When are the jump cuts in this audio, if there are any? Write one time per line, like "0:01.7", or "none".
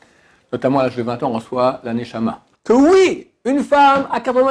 0:02.5